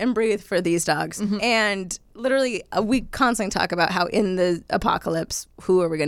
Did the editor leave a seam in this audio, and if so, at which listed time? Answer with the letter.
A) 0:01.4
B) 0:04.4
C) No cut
A